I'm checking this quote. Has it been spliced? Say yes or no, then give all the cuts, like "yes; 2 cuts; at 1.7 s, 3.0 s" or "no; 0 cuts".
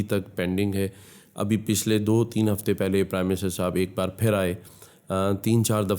no; 0 cuts